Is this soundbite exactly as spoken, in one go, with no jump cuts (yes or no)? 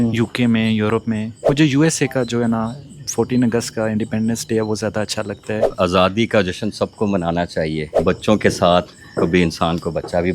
no